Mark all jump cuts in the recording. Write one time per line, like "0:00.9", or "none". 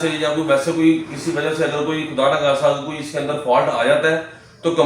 none